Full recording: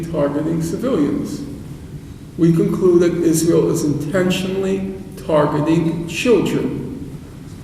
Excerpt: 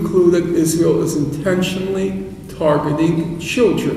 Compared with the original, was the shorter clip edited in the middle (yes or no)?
no